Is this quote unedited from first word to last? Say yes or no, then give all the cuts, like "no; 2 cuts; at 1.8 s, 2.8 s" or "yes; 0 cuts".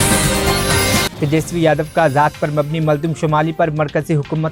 yes; 0 cuts